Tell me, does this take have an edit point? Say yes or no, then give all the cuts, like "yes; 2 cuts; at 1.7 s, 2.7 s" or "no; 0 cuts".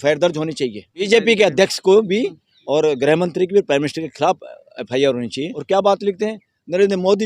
yes; 2 cuts; at 1.1 s, 5.6 s